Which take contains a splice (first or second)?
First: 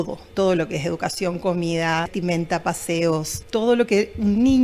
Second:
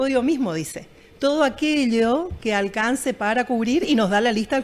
first